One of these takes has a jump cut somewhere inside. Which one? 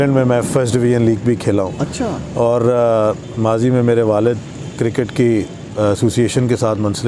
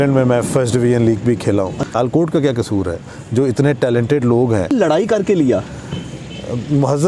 second; 2 cuts; at 2.0 s, 4.7 s

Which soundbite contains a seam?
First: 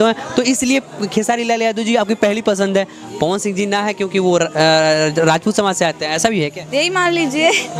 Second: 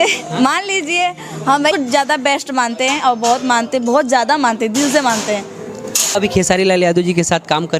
second; 2 cuts; at 1.7 s, 6.1 s

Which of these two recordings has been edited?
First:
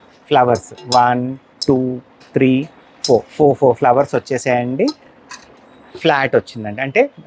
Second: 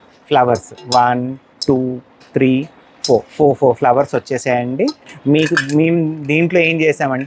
second; 1 cut; at 5.1 s

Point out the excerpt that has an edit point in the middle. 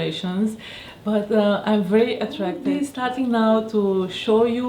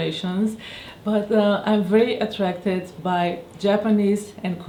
first; 1 cut; at 2.5 s

